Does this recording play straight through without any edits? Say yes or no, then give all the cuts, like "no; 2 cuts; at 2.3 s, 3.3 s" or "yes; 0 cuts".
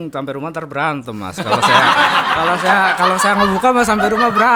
yes; 0 cuts